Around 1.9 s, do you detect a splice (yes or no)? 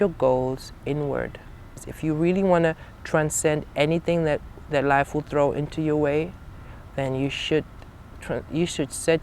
yes